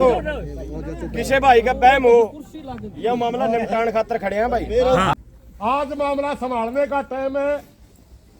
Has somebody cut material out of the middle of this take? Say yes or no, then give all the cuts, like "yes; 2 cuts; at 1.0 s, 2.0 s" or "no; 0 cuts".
yes; 1 cut; at 5.1 s